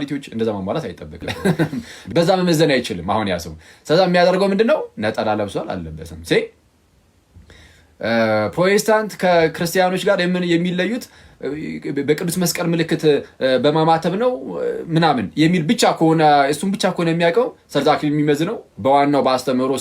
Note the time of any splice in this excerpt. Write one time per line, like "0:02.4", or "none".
0:01.3